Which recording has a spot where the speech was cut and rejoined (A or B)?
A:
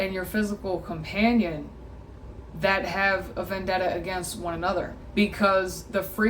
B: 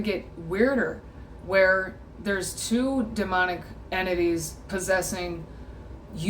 A